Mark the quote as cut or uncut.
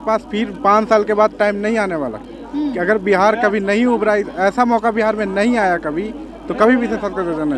uncut